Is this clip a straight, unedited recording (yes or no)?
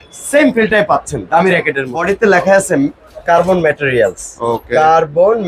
no